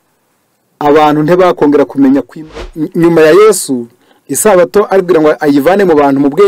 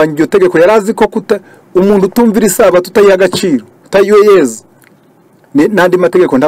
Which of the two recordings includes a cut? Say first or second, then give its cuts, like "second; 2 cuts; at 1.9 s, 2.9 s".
first; 1 cut; at 2.6 s